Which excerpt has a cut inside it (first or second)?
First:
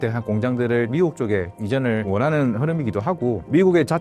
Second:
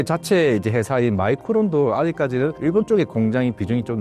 first